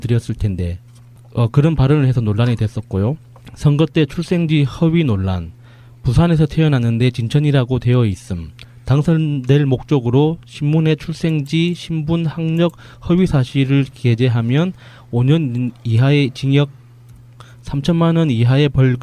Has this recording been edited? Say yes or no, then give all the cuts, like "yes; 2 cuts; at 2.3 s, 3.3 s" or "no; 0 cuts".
no; 0 cuts